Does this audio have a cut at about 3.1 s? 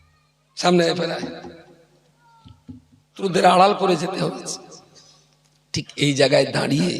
yes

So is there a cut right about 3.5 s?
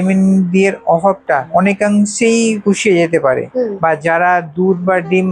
yes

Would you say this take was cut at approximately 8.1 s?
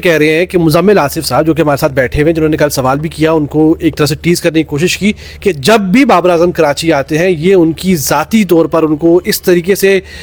no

